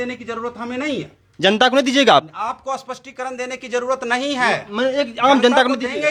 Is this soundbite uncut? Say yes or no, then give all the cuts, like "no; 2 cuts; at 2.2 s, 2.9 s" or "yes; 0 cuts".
yes; 0 cuts